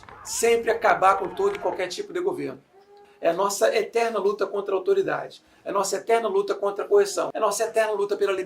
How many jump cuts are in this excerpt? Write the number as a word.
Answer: two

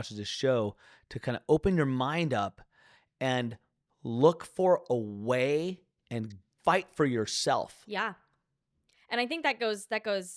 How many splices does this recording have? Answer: one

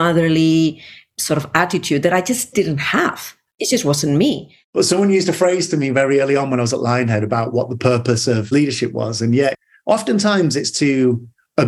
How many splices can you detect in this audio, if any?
one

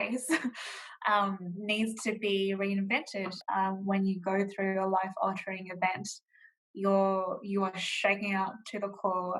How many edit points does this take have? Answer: one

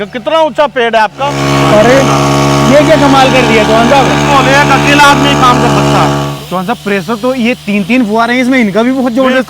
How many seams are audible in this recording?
two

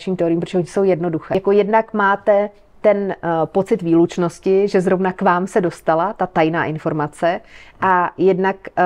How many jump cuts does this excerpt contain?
one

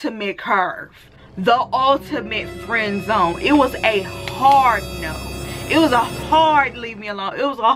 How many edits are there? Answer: zero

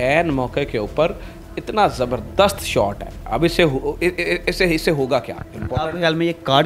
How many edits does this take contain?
zero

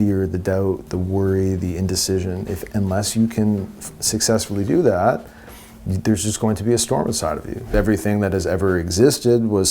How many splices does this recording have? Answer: one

